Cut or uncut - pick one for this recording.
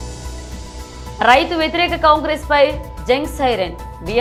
uncut